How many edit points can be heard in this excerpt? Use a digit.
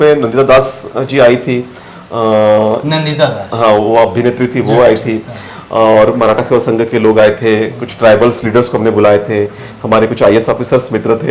0